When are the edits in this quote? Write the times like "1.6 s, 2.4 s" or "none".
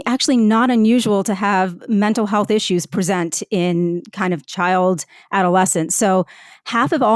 none